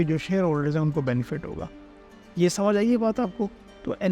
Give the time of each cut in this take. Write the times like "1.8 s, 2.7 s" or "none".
none

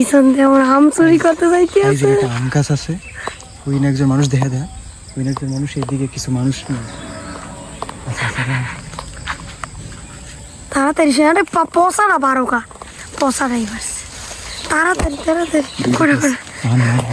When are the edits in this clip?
none

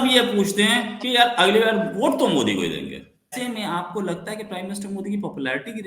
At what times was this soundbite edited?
3.3 s

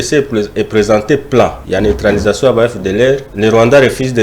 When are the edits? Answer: 1.6 s, 3.3 s

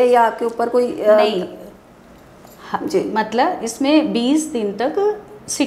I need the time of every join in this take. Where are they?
none

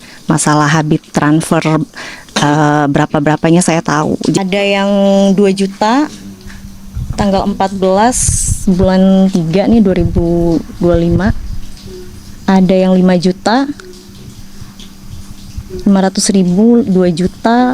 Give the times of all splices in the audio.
4.4 s

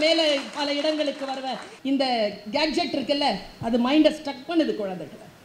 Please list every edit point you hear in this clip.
1.7 s

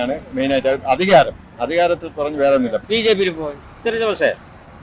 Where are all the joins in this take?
2.8 s, 3.8 s

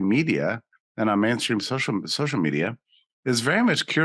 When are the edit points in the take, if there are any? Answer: none

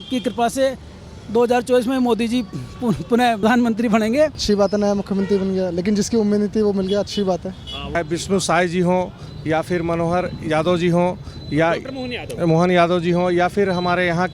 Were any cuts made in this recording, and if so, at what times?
4.4 s, 7.9 s

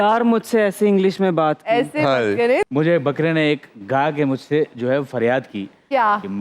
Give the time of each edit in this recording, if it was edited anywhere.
2.6 s

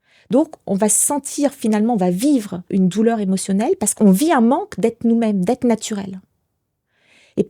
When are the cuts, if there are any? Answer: 2.6 s, 3.9 s

